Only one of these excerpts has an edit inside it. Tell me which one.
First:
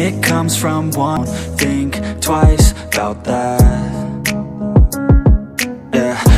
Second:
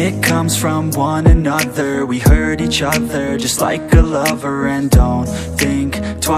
first; 1 cut; at 1.2 s

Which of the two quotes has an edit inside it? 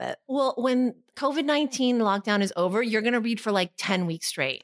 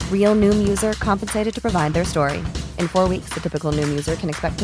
first; 1 cut; at 1.1 s

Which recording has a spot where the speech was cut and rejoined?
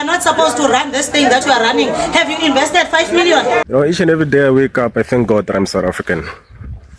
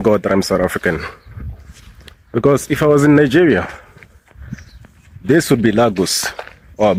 first; 1 cut; at 3.6 s

